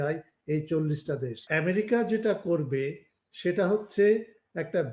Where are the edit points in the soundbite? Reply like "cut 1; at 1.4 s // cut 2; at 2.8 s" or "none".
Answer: cut 1; at 1.4 s